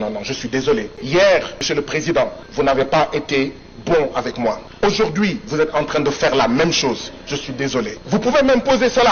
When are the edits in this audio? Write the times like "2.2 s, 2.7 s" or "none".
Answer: 1.0 s, 1.6 s, 2.4 s, 4.7 s, 8.0 s

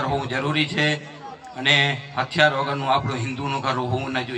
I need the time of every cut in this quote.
none

